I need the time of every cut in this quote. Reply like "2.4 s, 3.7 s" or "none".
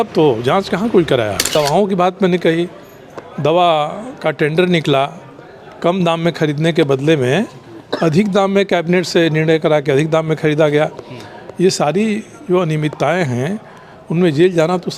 1.5 s

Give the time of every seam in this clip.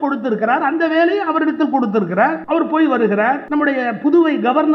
2.4 s, 3.4 s

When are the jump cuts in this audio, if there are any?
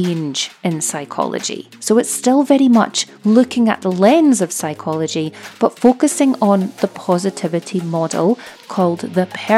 8.5 s

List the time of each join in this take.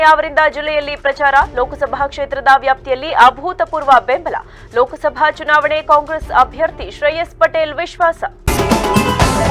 8.4 s

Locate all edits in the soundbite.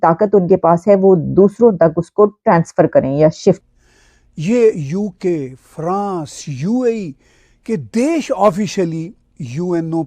3.6 s

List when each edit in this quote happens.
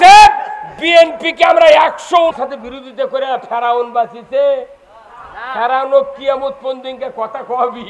2.3 s

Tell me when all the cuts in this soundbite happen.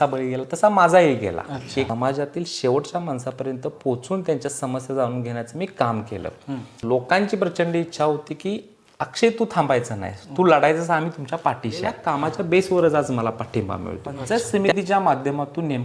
1.9 s, 6.8 s, 12.1 s, 14.2 s

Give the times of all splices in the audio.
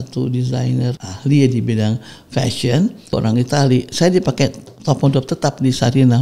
1.0 s, 3.2 s

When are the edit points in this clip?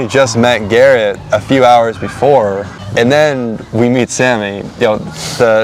2.7 s

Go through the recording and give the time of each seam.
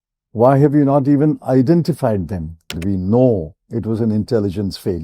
2.8 s

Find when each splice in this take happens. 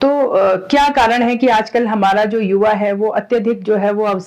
none

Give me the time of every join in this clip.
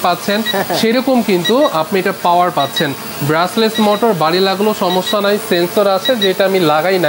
none

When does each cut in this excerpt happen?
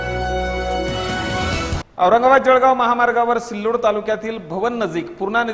1.9 s

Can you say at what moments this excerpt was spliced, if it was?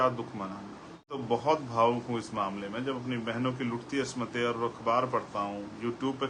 1.2 s

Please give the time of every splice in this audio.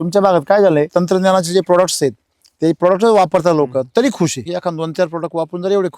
0.9 s, 4.5 s

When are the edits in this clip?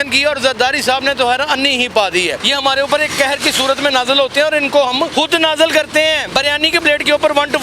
2.4 s, 5.1 s, 6.2 s

